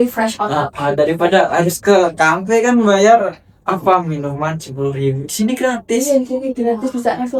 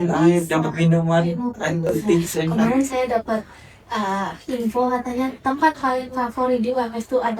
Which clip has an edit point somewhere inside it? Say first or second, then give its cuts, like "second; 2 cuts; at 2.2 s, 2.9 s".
second; 1 cut; at 2.5 s